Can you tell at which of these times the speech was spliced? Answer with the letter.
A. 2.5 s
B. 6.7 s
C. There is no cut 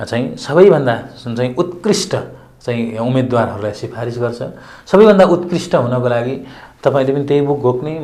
C